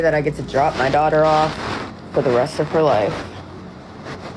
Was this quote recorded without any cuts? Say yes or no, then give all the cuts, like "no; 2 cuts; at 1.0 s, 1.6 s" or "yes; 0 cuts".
yes; 0 cuts